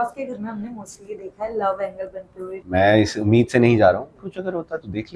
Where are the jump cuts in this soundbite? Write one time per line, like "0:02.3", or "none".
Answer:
0:02.6
0:04.2